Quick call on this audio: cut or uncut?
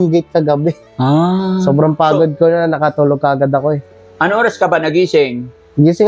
uncut